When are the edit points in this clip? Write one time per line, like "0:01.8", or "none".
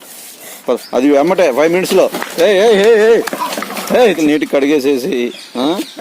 0:04.2